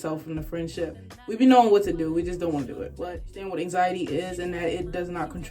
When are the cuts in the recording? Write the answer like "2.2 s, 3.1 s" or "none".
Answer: 1.1 s, 3.3 s